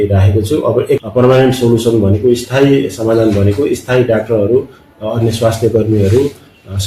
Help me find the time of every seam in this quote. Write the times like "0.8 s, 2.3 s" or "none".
1.0 s